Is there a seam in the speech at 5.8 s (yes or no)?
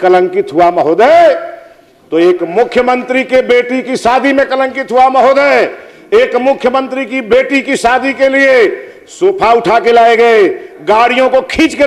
no